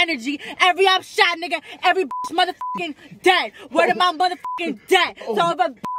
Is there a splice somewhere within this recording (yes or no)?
no